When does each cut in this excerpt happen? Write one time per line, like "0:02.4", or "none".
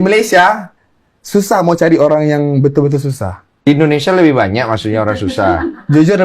0:03.6

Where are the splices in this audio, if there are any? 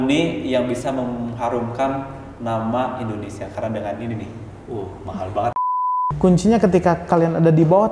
0:05.9

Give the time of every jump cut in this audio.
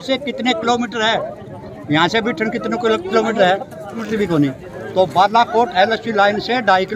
none

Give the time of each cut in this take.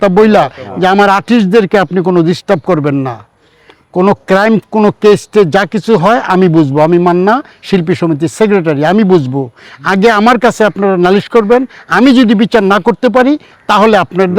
none

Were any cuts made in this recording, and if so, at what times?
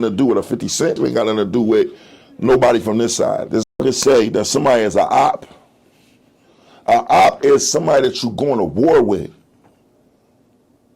0:01.0
0:03.7

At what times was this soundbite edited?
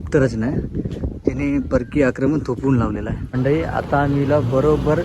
0:03.2

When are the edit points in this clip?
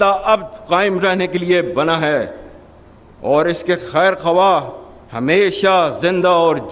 none

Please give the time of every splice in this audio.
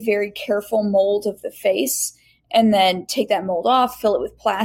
none

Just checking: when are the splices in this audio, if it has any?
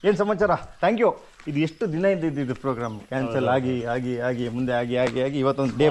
none

